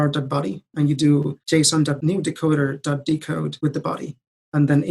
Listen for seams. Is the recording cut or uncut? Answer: cut